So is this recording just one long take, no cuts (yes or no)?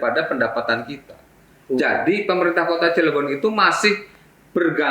yes